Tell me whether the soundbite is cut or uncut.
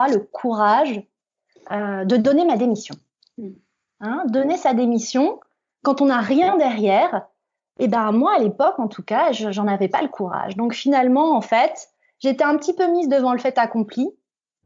uncut